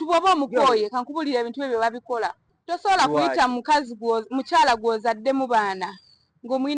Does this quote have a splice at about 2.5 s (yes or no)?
yes